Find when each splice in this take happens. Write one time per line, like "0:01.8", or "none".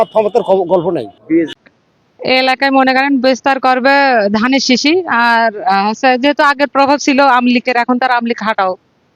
0:01.5